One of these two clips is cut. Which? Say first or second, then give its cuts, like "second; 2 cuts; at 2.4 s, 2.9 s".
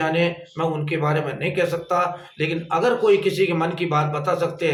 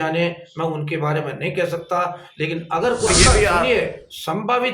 second; 1 cut; at 3.1 s